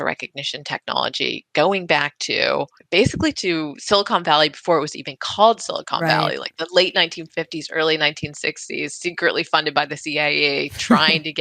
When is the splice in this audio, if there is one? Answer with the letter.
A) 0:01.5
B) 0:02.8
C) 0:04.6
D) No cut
B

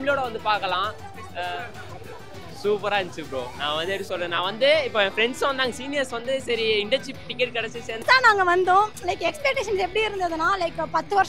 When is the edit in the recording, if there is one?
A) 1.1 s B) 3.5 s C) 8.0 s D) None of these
C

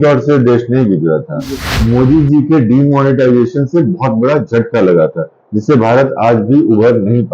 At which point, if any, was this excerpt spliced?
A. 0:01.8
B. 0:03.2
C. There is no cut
A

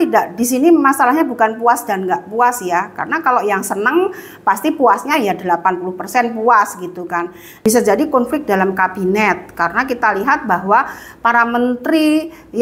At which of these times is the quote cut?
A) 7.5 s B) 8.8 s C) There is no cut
A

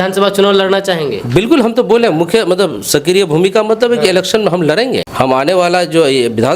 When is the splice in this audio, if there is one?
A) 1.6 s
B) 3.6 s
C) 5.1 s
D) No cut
C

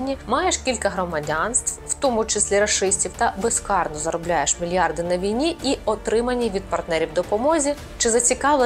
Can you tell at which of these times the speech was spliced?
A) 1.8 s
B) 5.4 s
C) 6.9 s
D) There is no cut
D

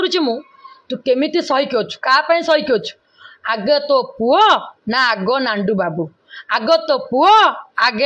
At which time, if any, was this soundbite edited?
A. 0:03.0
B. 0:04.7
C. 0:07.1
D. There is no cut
D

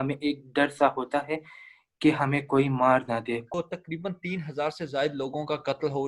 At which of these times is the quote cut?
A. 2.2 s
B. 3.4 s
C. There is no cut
B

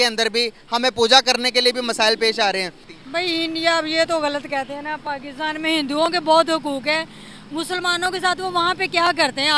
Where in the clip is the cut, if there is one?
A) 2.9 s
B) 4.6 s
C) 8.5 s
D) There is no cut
A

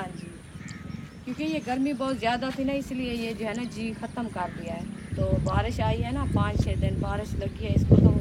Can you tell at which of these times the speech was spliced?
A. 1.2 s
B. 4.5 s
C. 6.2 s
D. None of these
D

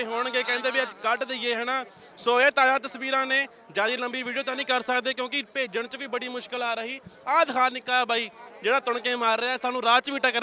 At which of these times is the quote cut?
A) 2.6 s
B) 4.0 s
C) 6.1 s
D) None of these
D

